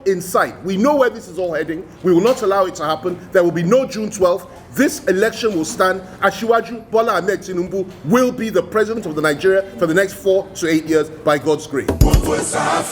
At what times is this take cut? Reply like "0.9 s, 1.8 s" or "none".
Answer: 11.8 s